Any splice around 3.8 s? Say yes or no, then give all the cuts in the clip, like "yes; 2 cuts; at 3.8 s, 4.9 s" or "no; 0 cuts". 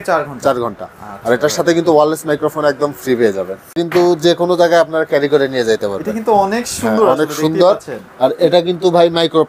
yes; 1 cut; at 3.8 s